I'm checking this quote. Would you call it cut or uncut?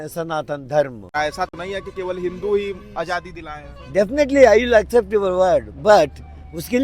cut